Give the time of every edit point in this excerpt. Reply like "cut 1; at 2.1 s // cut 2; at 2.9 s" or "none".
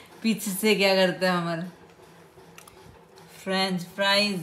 none